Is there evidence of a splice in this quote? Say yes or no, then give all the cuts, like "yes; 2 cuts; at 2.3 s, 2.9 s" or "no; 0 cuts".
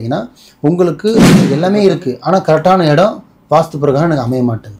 yes; 1 cut; at 1.5 s